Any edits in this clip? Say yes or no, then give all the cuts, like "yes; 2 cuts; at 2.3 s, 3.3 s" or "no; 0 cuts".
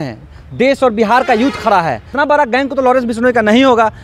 yes; 1 cut; at 2.1 s